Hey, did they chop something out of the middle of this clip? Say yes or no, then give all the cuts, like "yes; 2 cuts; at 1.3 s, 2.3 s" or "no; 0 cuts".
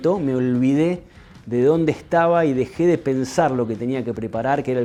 no; 0 cuts